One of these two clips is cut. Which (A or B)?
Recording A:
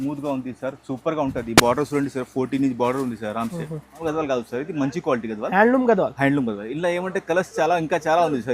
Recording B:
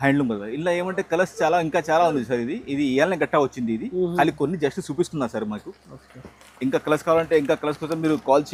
A